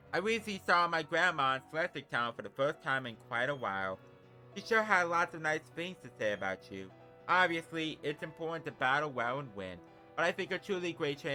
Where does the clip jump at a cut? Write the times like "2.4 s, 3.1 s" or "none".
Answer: none